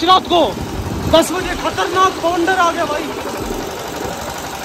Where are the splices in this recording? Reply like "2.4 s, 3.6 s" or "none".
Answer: none

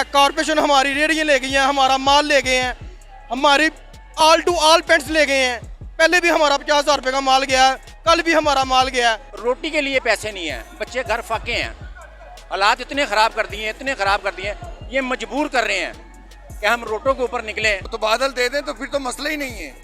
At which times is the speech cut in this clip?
9.3 s, 17.9 s

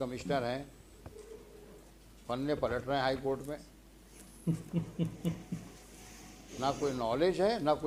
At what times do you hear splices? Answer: none

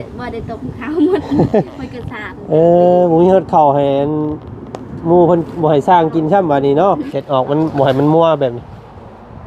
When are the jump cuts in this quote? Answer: 7.0 s

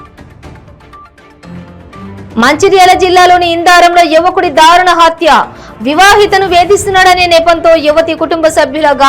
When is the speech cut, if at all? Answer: 2.0 s

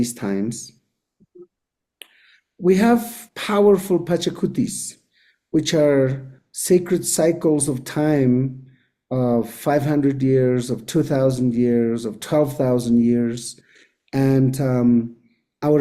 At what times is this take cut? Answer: none

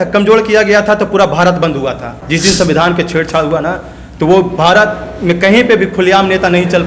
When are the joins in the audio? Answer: 2.1 s

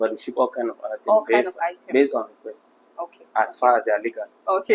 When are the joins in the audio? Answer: none

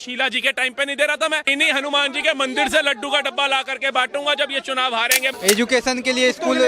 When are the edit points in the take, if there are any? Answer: 1.5 s, 5.3 s

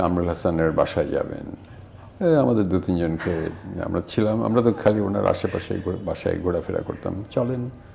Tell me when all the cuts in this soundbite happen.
none

